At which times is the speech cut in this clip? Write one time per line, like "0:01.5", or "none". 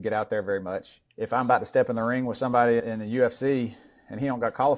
0:00.9